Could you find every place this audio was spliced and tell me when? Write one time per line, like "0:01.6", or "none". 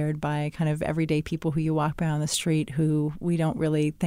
none